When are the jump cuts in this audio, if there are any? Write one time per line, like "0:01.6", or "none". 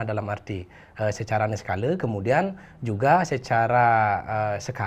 none